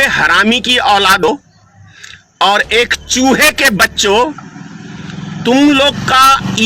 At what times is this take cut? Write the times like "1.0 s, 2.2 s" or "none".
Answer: 1.3 s